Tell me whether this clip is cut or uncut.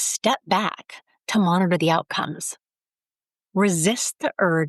uncut